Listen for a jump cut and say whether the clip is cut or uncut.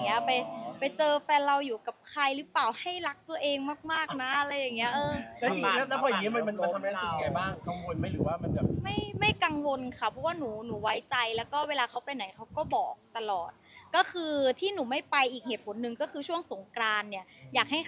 uncut